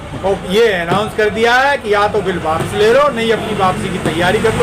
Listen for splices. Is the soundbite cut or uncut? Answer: uncut